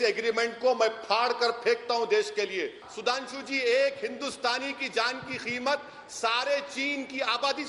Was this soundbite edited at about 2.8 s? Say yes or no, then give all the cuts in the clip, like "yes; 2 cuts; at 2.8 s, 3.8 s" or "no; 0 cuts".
yes; 1 cut; at 2.8 s